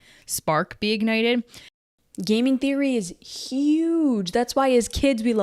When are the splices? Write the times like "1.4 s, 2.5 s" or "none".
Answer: 1.8 s